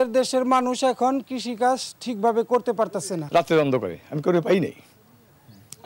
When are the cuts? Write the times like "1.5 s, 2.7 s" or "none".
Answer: 3.2 s